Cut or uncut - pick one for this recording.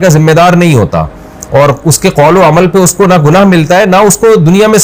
uncut